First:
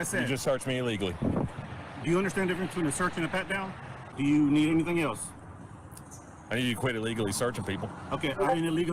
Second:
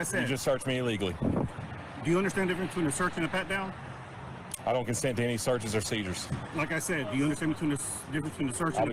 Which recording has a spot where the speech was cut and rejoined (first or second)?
first